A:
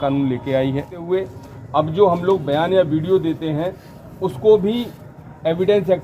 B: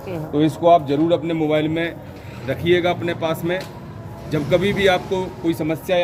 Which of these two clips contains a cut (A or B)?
A